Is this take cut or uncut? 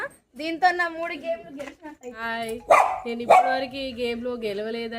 cut